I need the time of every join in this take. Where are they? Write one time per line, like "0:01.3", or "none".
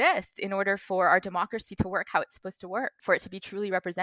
0:03.0